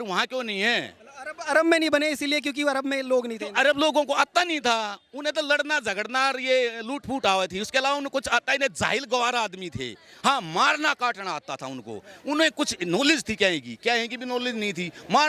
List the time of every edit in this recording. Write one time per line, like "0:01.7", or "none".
none